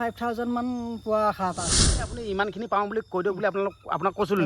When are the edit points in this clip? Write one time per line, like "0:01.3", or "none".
0:02.1